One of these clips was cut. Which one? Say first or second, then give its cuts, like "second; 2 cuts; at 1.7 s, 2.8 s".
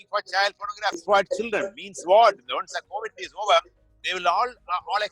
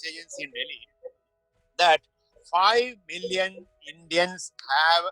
first; 1 cut; at 1.0 s